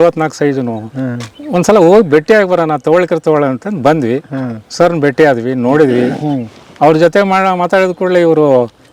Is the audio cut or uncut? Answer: uncut